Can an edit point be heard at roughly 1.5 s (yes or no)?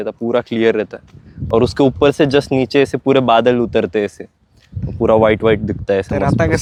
no